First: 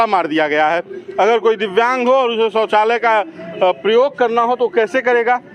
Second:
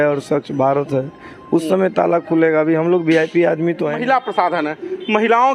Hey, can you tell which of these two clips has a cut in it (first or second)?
second